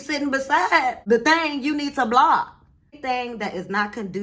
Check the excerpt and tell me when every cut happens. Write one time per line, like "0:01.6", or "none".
0:01.0
0:02.9